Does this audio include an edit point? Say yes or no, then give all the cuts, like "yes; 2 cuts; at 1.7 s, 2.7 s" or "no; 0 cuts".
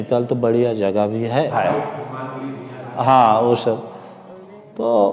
yes; 1 cut; at 1.6 s